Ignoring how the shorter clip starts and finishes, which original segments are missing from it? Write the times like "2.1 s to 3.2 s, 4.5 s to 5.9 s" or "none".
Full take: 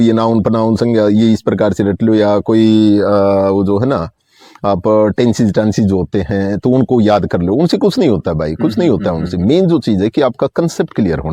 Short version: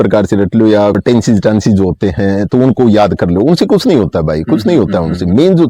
2.4 s to 5.1 s